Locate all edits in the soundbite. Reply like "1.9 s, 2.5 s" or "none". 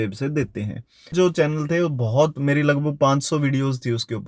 1.1 s